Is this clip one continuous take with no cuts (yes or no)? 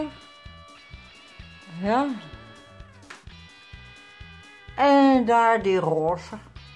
yes